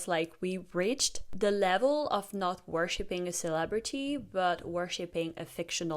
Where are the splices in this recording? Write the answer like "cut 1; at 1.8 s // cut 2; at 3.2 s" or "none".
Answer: cut 1; at 1.2 s